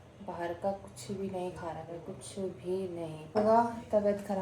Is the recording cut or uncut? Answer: cut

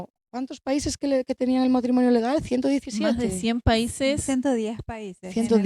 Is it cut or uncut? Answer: uncut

